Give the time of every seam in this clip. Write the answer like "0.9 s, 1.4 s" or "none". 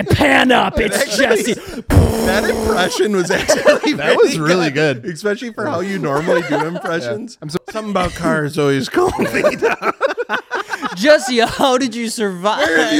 7.6 s